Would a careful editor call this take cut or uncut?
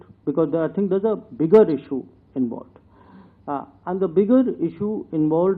uncut